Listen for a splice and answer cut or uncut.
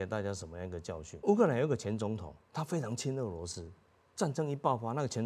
cut